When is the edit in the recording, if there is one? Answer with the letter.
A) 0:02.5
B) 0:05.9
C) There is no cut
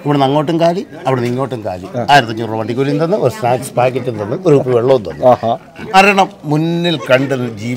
B